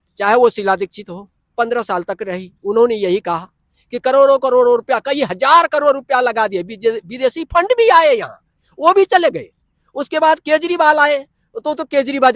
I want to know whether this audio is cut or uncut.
uncut